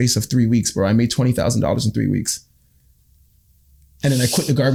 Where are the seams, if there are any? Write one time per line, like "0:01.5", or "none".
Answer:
none